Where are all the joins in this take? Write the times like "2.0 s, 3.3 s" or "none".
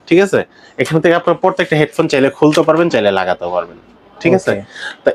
none

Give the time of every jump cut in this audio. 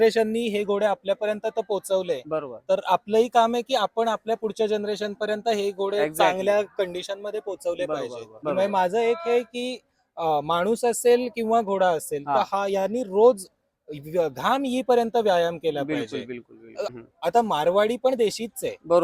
8.3 s, 16.9 s

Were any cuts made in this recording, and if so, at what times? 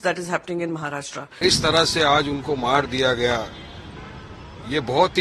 1.4 s

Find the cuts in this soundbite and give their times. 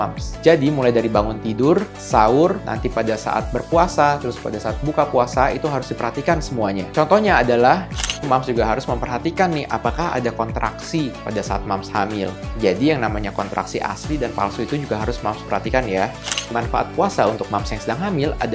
2.7 s, 4.3 s, 8.2 s, 16.5 s

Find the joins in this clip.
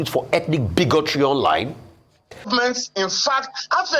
2.5 s

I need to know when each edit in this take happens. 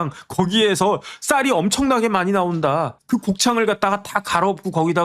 3.0 s

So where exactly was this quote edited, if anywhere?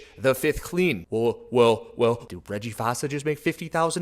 2.2 s

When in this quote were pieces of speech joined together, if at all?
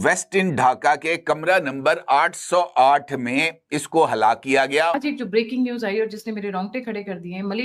5.0 s

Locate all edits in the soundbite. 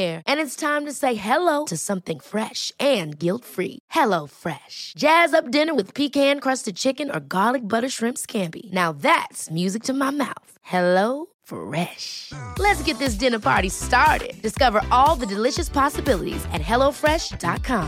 none

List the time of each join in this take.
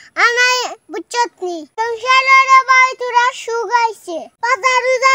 4.2 s

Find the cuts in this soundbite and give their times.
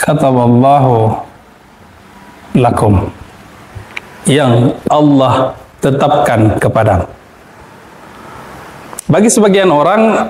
none

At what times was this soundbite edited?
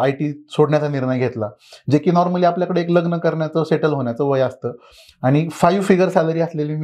none

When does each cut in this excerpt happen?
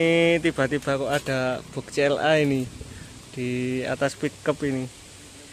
none

